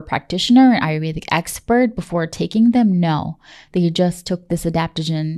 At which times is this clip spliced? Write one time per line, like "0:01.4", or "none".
none

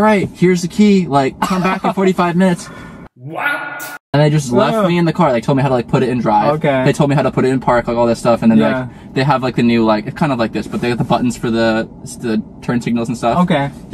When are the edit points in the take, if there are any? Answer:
none

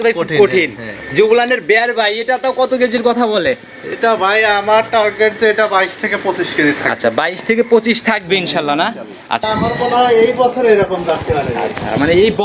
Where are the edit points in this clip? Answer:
0:09.5

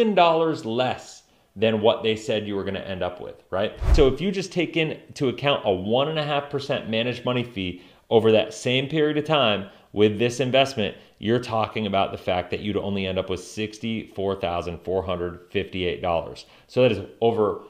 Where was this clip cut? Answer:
0:03.9

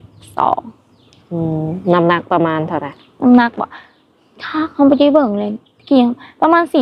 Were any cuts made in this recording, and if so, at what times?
none

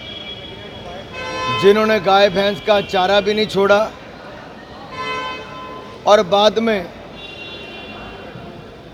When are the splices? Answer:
none

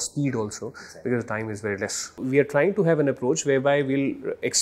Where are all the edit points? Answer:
0:02.2

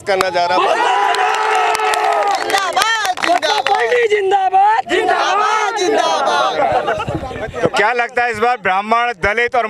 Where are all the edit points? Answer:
none

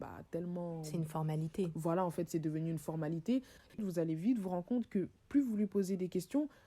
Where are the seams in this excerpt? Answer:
0:03.7

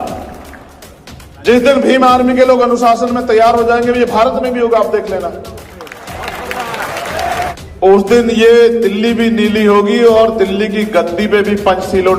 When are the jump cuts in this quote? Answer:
0:07.5

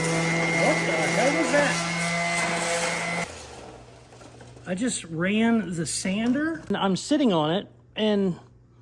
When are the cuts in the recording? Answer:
0:03.2
0:06.7

